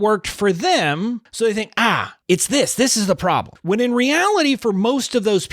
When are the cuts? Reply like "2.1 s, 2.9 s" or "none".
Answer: 1.3 s, 2.1 s, 3.5 s